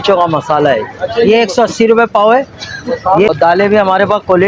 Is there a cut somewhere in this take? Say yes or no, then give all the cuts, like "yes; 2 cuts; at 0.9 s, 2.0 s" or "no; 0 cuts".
yes; 1 cut; at 3.3 s